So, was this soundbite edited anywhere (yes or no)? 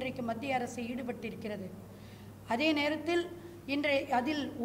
no